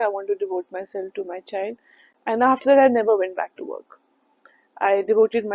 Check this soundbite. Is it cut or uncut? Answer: uncut